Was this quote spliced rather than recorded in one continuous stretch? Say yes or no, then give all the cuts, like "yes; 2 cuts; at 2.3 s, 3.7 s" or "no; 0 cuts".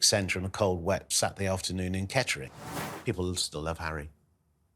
yes; 1 cut; at 2.6 s